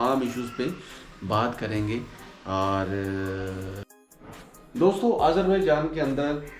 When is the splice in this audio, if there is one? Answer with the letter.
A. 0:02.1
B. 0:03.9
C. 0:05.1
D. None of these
B